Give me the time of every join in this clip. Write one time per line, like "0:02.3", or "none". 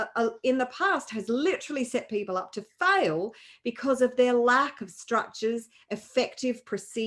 none